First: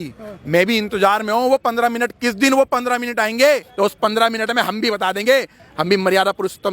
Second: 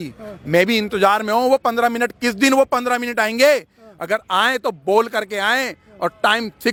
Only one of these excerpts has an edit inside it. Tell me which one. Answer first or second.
first